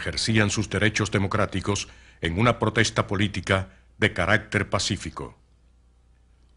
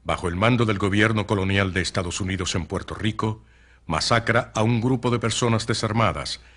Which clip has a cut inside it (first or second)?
second